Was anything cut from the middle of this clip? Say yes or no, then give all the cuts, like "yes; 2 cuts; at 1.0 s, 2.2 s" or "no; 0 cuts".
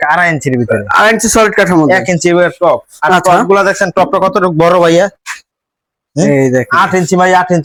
no; 0 cuts